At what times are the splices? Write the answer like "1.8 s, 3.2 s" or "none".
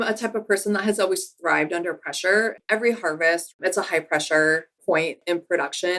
none